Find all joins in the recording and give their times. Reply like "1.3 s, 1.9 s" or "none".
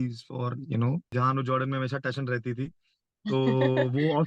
1.1 s